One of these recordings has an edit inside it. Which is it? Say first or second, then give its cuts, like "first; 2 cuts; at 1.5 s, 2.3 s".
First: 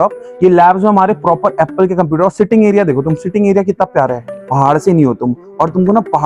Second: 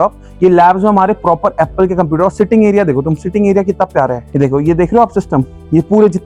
first; 1 cut; at 4.3 s